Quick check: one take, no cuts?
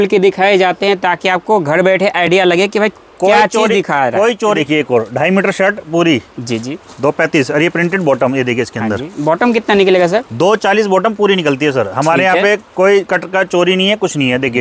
no; 1 cut; at 4.6 s

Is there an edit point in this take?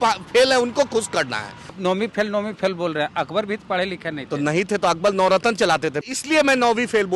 yes; 2 cuts; at 1.7 s, 6.1 s

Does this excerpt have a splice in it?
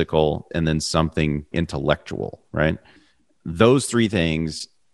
yes; 1 cut; at 2.9 s

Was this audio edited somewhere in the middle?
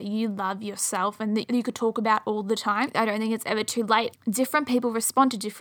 yes; 3 cuts; at 1.4 s, 2.9 s, 4.1 s

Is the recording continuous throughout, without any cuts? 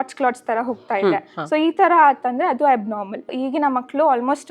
no; 1 cut; at 3.3 s

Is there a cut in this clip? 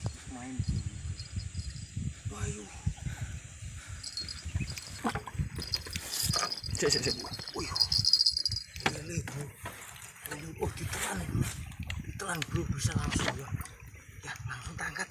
yes; 1 cut; at 5.0 s

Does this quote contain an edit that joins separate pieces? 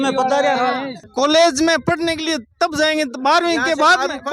yes; 1 cut; at 1.0 s

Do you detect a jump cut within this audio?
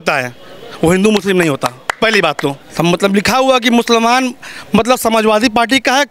yes; 1 cut; at 2.6 s

